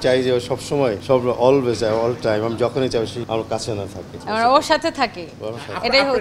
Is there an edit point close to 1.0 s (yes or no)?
yes